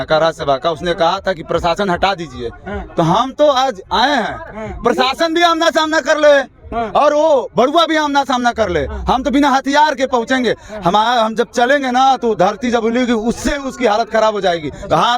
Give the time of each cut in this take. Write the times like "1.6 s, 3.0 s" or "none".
none